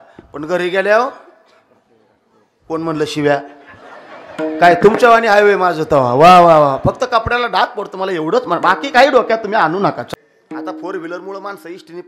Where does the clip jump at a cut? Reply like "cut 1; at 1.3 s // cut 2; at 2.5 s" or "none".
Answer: cut 1; at 10.1 s

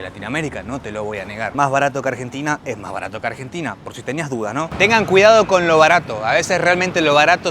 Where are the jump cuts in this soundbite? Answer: cut 1; at 4.7 s

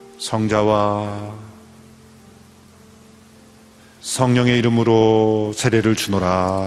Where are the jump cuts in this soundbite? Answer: none

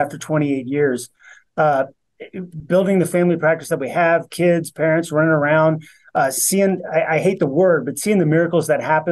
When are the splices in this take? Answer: none

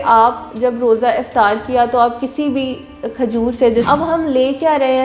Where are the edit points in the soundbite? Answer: cut 1; at 3.9 s

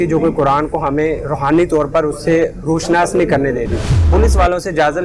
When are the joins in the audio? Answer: cut 1; at 3.8 s

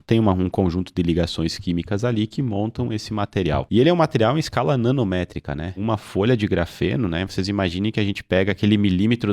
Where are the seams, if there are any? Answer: cut 1; at 3.7 s // cut 2; at 5.8 s

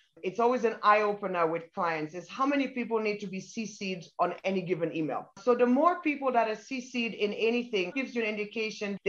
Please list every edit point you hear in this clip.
none

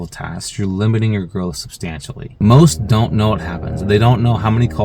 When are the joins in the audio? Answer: cut 1; at 2.2 s

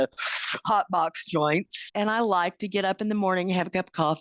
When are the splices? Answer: cut 1; at 1.8 s

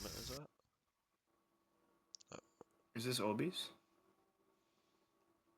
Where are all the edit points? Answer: cut 1; at 1.3 s

